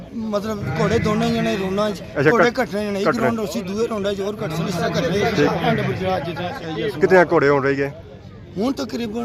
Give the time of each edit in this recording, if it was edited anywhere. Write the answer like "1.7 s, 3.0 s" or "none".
none